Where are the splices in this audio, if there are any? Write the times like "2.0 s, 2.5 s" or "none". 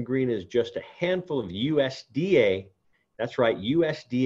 none